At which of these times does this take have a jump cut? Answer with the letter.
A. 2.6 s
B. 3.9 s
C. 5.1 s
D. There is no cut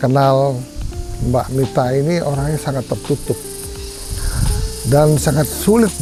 D